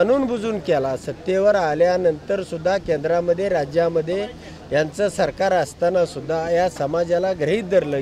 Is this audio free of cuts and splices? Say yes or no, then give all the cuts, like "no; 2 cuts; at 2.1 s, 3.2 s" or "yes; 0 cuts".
yes; 0 cuts